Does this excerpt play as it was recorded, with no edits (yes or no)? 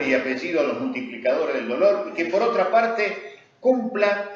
no